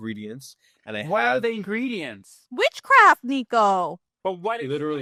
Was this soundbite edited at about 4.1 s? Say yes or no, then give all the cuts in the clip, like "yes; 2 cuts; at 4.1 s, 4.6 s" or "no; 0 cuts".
no; 0 cuts